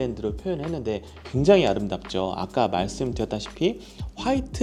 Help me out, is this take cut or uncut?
uncut